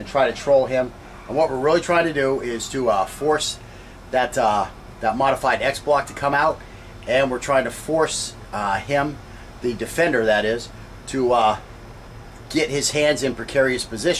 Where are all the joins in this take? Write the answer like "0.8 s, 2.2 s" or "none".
7.3 s